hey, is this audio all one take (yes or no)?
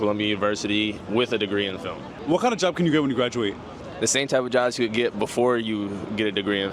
yes